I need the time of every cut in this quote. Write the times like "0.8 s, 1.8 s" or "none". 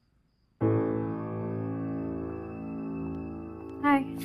2.4 s